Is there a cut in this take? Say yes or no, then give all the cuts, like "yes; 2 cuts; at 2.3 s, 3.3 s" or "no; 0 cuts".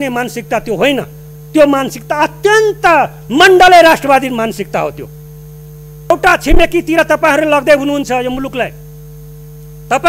yes; 1 cut; at 6.1 s